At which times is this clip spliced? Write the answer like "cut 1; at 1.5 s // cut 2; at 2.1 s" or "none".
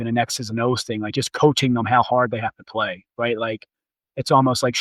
none